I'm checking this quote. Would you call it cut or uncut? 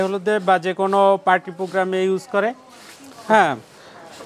uncut